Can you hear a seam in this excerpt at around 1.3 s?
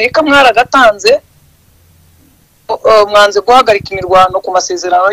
no; 0 cuts

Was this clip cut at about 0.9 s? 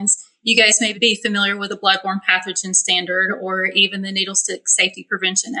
yes; 1 cut; at 0.9 s

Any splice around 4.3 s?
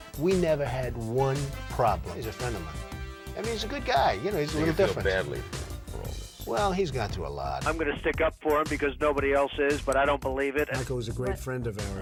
no; 0 cuts

